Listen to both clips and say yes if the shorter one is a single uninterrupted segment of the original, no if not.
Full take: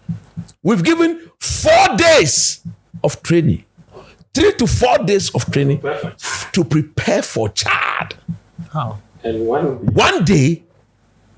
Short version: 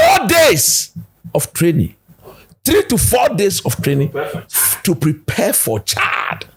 yes